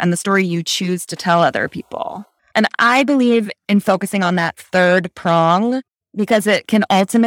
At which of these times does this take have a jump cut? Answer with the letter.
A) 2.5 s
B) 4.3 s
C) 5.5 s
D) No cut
A